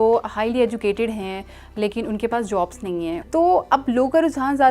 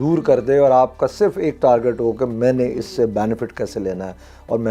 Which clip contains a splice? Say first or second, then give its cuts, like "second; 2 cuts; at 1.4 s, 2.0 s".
first; 1 cut; at 3.2 s